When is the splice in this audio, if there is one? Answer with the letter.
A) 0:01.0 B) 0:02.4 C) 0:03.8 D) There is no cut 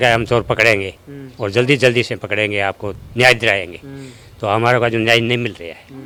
D